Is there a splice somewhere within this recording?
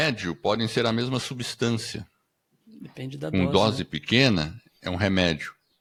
no; 0 cuts

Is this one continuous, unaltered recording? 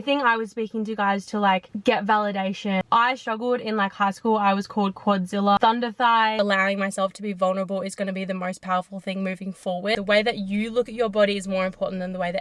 no; 4 cuts; at 2.8 s, 5.6 s, 6.4 s, 9.9 s

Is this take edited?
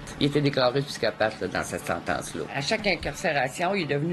yes; 1 cut; at 2.6 s

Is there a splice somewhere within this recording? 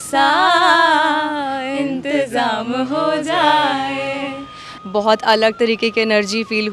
yes; 1 cut; at 4.7 s

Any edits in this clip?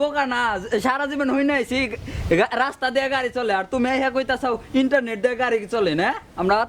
no; 0 cuts

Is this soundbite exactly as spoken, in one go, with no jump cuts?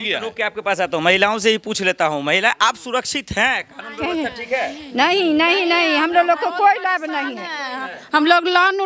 yes; 0 cuts

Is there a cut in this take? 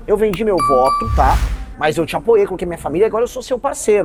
no; 0 cuts

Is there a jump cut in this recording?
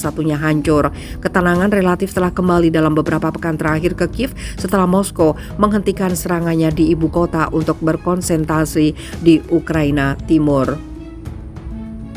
yes; 1 cut; at 10.8 s

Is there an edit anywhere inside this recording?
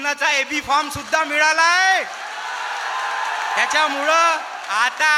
no; 0 cuts

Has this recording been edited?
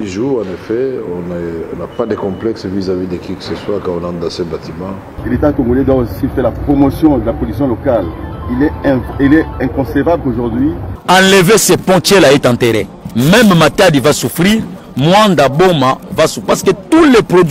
yes; 3 cuts; at 5.1 s, 10.9 s, 13.0 s

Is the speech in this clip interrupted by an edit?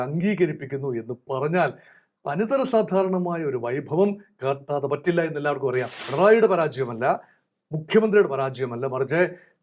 yes; 1 cut; at 6.0 s

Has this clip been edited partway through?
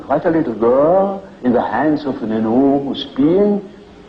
yes; 1 cut; at 2.9 s

